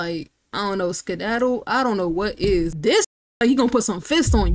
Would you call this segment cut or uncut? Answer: uncut